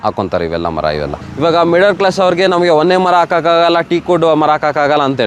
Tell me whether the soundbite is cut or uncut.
cut